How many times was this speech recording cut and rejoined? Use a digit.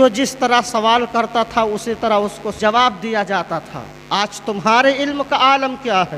1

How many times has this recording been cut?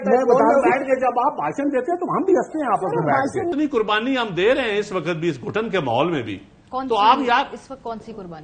1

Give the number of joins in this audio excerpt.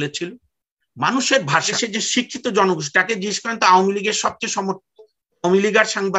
1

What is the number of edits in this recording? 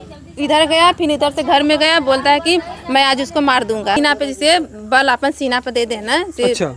1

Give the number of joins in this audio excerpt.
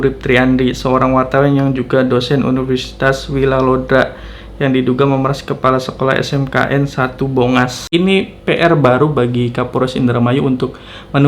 1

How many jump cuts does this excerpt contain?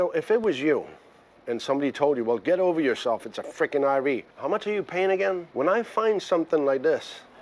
2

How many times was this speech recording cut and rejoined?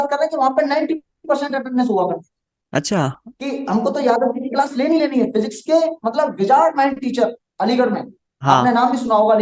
0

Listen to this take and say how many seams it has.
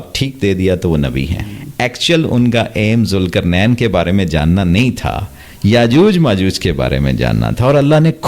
1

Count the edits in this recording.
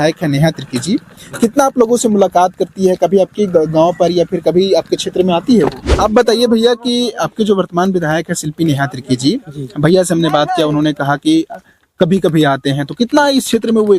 1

